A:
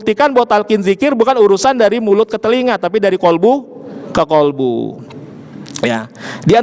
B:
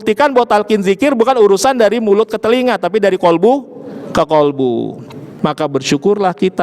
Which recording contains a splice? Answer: B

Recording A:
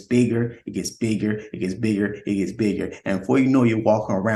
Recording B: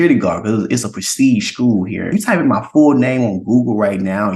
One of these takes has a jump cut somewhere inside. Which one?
B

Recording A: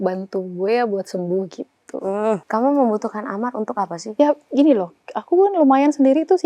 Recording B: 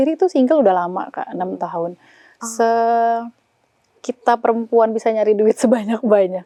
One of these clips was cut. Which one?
A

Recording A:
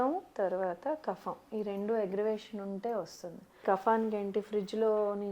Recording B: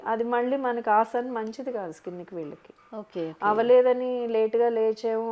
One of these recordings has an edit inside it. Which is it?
A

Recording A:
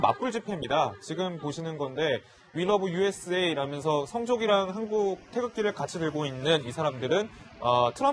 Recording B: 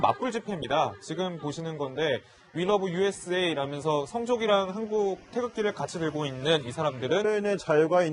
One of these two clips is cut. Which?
A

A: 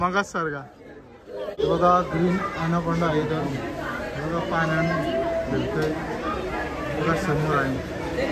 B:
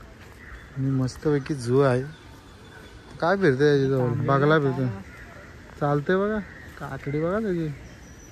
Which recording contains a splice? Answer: A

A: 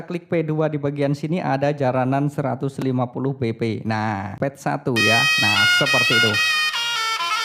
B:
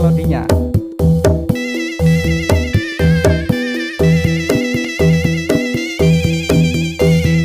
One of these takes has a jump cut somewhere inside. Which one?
A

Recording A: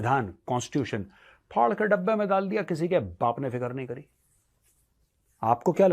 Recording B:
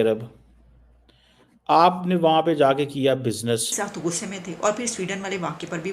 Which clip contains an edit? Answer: B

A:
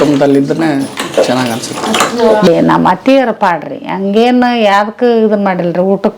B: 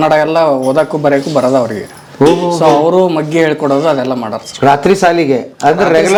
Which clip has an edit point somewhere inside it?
A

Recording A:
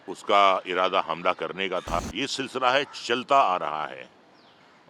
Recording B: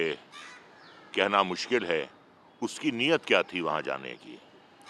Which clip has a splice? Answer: A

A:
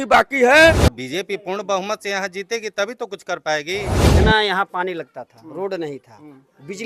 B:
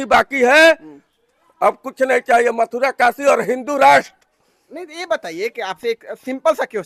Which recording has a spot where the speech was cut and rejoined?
A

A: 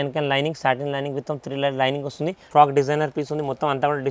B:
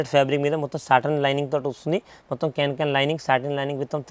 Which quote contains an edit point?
A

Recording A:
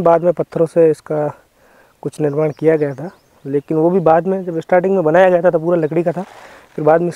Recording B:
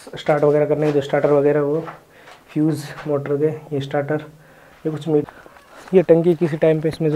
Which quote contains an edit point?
B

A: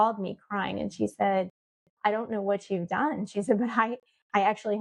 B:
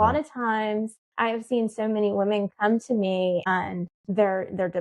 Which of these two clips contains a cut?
B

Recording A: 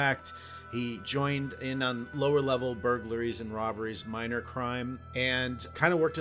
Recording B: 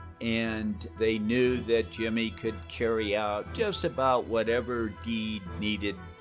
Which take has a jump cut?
A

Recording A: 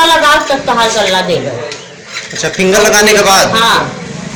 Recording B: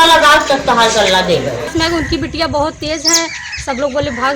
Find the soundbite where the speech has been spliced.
B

